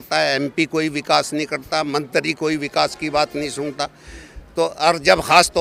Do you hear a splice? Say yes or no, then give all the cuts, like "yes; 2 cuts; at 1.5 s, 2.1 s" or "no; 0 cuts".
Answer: no; 0 cuts